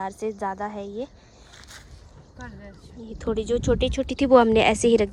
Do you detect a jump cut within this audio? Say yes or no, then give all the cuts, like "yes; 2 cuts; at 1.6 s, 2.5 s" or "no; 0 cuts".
no; 0 cuts